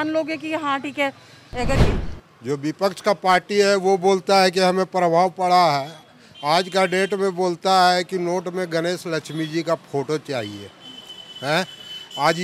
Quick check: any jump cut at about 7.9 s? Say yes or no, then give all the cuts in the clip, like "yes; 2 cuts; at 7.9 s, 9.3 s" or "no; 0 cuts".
no; 1 cut; at 1.8 s